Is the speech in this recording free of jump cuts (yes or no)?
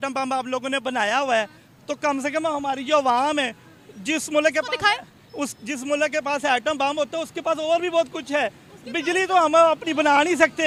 yes